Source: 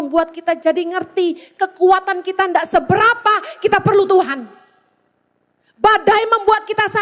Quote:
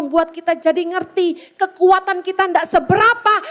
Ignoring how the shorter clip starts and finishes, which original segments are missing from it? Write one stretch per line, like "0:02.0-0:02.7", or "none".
none